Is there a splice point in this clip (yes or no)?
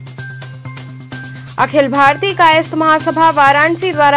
no